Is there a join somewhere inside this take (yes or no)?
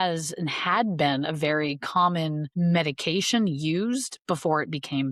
no